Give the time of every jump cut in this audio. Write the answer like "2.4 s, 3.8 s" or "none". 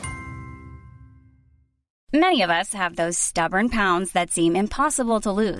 1.9 s

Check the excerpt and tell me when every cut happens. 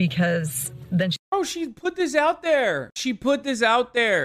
2.9 s

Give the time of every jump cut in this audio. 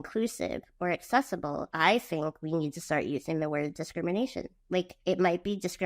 1.7 s, 4.9 s

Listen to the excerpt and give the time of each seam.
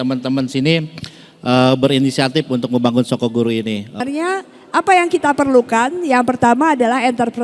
4.0 s

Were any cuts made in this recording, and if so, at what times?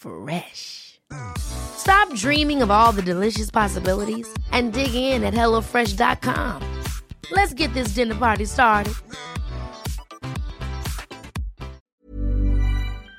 11.8 s

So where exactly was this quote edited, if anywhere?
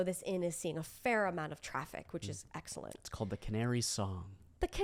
none

